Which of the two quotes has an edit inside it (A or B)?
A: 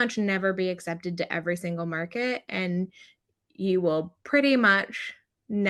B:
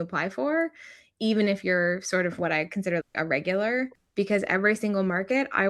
B